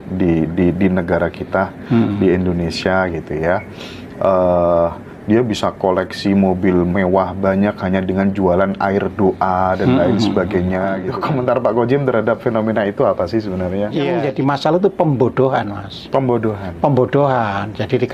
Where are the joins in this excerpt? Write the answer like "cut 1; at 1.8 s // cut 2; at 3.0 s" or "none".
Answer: cut 1; at 11.1 s // cut 2; at 14.2 s